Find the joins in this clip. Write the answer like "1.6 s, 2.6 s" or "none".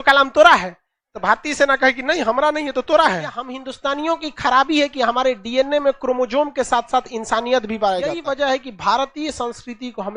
3.6 s, 8.2 s